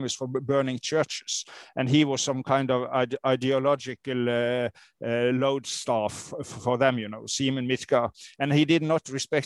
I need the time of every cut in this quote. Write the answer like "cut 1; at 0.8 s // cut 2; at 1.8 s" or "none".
none